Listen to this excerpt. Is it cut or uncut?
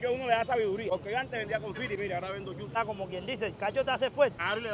cut